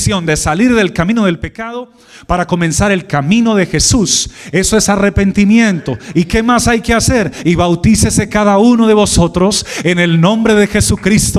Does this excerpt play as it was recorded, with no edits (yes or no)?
yes